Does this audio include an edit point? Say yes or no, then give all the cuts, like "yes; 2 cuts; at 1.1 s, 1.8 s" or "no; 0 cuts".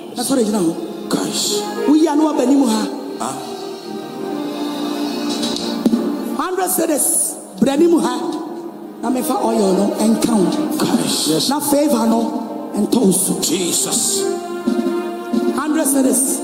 no; 0 cuts